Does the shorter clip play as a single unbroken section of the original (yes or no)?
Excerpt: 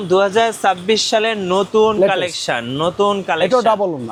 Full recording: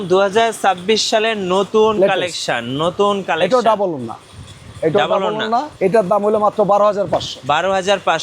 yes